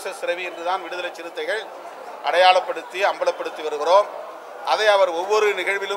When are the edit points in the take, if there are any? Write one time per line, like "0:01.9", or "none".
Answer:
none